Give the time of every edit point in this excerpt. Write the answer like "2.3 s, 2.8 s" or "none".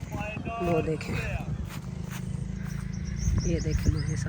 1.8 s